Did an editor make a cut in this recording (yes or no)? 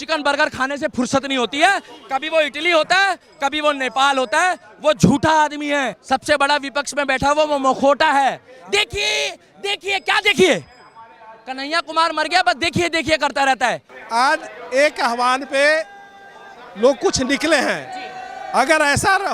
yes